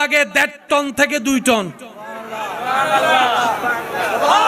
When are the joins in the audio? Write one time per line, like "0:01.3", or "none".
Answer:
none